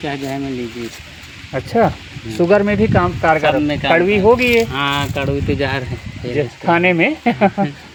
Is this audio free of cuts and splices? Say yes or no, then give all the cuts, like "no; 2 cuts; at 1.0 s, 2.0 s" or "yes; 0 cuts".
yes; 0 cuts